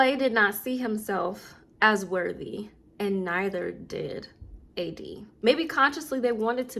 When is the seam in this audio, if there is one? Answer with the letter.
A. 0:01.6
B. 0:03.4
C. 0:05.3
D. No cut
C